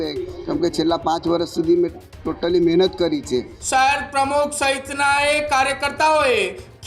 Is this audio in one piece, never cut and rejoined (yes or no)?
no